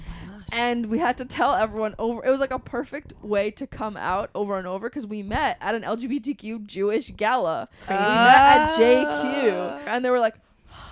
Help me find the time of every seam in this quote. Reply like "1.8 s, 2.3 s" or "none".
9.9 s